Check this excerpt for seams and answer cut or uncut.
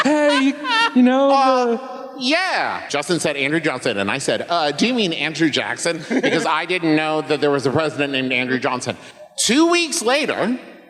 cut